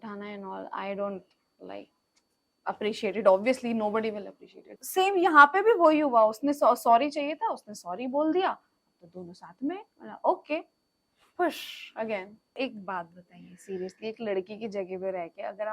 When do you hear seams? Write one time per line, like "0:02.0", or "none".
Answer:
0:04.8
0:12.6